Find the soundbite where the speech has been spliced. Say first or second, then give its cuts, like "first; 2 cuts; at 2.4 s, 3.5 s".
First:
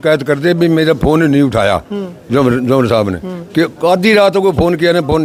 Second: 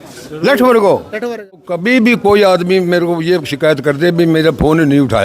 second; 1 cut; at 1.6 s